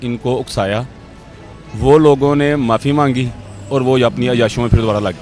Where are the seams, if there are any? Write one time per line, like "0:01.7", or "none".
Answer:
none

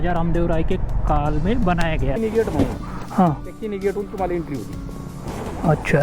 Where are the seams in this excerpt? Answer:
0:02.2

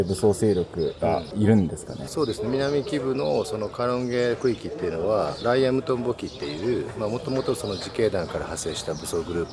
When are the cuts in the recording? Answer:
none

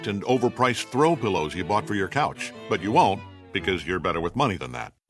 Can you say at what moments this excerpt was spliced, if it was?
none

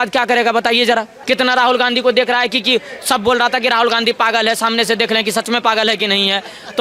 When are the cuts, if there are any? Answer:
0:01.2

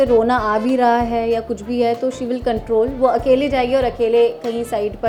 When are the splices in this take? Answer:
none

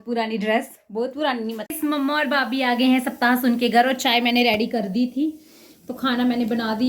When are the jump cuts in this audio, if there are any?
0:01.6

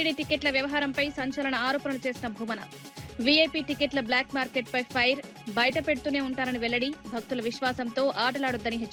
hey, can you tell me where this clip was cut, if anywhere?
none

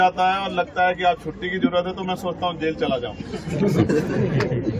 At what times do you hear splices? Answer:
none

